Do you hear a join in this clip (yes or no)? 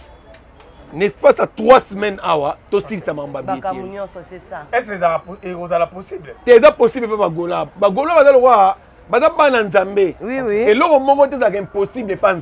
no